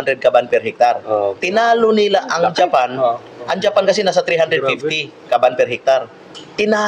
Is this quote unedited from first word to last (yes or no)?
yes